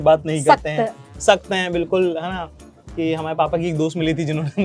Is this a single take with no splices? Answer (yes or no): yes